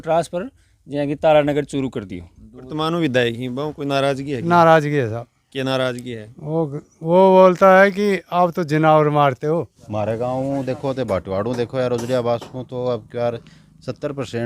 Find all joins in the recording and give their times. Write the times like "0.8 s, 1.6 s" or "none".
2.7 s, 9.8 s